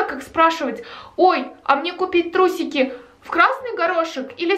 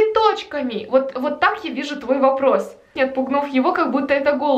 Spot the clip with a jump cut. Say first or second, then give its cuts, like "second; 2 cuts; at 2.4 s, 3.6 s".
second; 1 cut; at 2.9 s